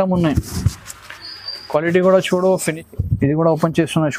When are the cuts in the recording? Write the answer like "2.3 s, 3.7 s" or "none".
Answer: 2.7 s